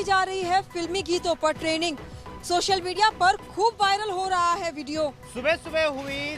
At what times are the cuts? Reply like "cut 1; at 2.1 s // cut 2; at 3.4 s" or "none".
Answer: cut 1; at 5.2 s

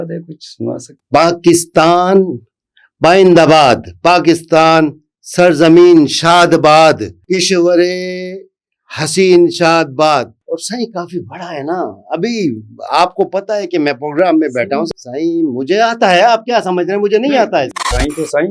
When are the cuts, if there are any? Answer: cut 1; at 0.9 s // cut 2; at 7.1 s // cut 3; at 10.4 s // cut 4; at 14.9 s // cut 5; at 17.5 s

